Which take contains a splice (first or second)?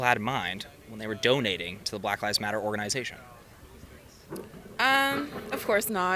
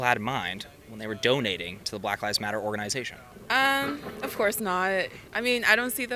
second